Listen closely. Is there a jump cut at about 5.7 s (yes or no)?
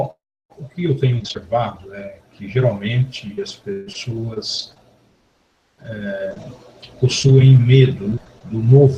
no